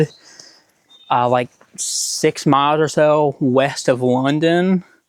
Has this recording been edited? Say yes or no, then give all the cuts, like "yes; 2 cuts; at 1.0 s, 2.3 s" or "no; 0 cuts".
no; 0 cuts